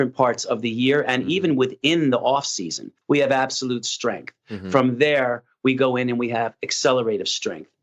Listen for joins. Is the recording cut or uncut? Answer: cut